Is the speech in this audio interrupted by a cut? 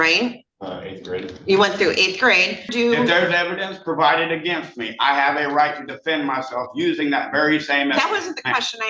yes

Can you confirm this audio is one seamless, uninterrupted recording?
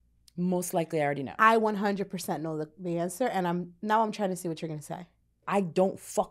no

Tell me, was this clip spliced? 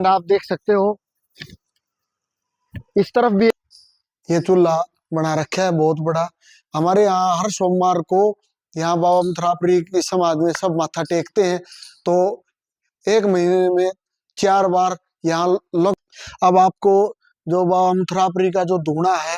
yes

